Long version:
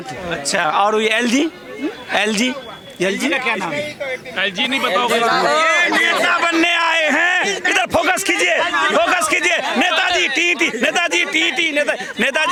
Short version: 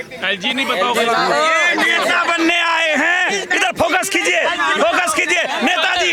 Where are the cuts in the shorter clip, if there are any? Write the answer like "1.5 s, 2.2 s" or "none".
none

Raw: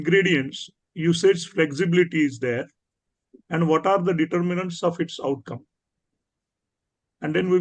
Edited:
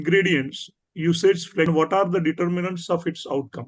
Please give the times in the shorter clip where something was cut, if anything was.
1.7 s

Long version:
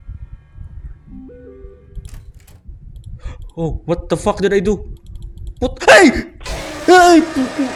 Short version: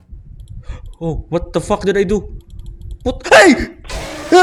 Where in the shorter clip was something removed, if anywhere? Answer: none

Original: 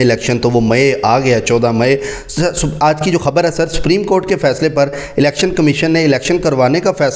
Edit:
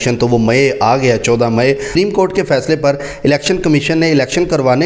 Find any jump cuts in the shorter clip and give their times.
1.9 s

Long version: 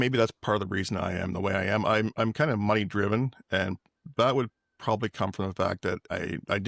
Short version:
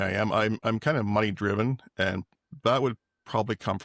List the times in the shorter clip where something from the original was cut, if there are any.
none

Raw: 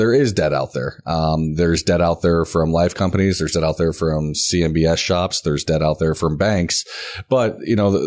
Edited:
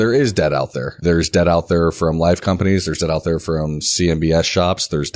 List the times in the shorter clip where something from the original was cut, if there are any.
1.0 s

